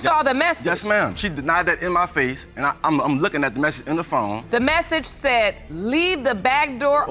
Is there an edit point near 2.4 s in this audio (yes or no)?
no